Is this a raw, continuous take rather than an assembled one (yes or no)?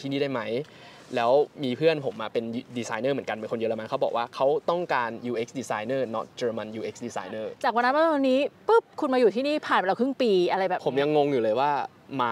no